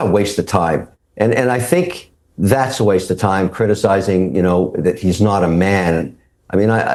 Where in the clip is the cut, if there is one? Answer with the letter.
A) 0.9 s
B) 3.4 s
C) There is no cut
C